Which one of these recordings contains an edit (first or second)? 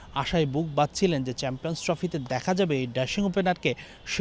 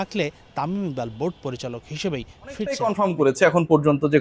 second